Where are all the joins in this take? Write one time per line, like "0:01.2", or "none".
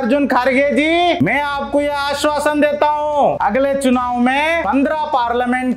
0:01.2
0:03.4
0:04.6